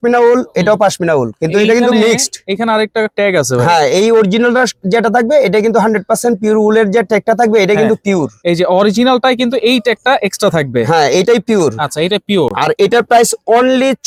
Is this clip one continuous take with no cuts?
yes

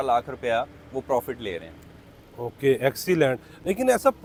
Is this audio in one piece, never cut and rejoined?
yes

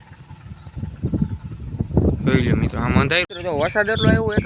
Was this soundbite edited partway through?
yes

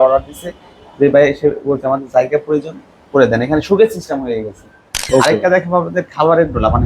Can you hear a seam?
yes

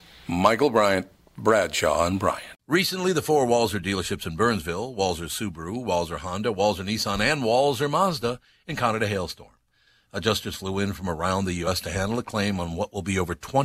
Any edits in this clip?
yes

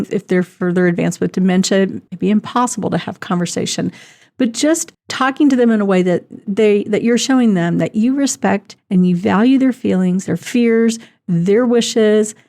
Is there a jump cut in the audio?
yes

